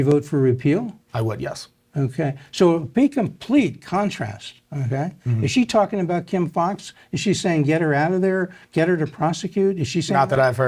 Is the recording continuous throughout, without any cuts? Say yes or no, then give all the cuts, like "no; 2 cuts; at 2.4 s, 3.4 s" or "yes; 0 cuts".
yes; 0 cuts